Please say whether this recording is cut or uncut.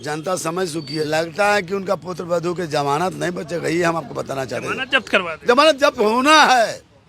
cut